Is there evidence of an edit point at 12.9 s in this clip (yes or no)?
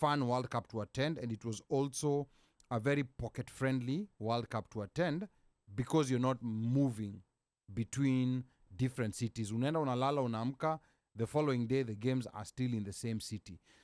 no